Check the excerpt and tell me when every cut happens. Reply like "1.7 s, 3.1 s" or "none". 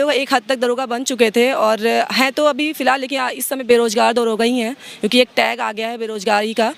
none